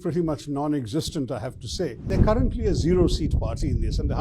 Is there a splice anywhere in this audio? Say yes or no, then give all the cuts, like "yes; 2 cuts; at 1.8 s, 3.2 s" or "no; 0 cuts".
yes; 1 cut; at 2.1 s